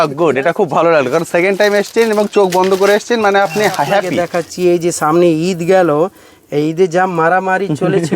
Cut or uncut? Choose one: cut